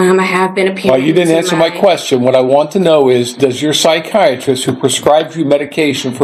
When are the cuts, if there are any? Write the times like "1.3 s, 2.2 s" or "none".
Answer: none